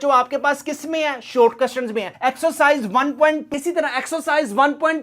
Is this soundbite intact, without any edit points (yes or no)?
no